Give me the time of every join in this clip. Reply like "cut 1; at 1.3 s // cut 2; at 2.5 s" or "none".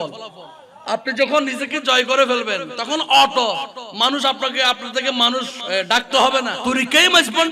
cut 1; at 5.6 s // cut 2; at 6.6 s